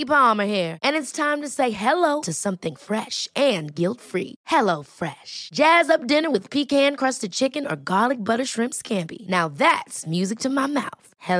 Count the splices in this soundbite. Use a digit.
0